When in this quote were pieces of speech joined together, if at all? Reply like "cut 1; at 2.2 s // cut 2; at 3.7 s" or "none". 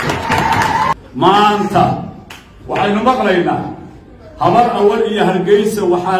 cut 1; at 1.0 s